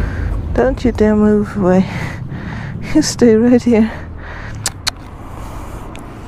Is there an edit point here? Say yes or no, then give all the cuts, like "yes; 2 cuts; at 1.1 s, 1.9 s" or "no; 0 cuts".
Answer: no; 0 cuts